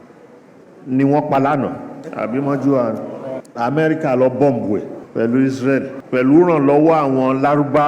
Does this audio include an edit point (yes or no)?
yes